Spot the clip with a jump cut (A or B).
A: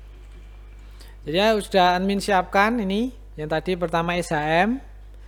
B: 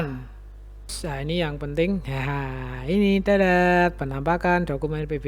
B